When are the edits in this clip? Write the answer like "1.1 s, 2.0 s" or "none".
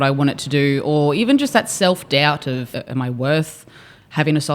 2.8 s